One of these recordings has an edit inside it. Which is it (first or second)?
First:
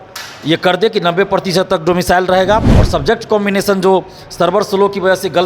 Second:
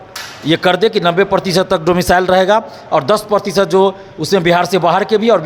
first